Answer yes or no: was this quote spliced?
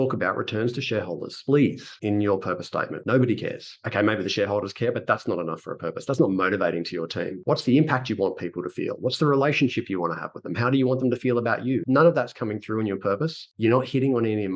no